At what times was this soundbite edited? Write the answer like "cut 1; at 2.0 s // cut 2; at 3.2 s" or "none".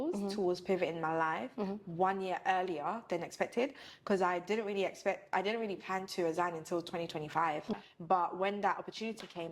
cut 1; at 7.9 s